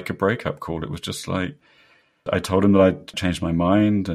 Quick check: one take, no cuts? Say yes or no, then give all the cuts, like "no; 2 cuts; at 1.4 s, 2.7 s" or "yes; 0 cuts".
no; 2 cuts; at 2.2 s, 3.1 s